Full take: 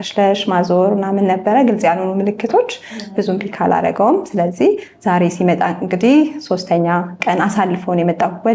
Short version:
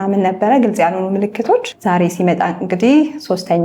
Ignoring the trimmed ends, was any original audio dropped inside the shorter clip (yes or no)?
yes